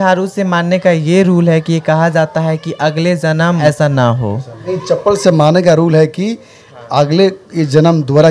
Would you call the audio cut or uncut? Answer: cut